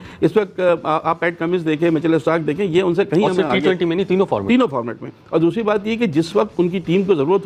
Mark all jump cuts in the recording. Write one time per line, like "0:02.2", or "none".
none